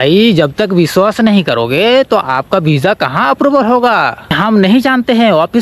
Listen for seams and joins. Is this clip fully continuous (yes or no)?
no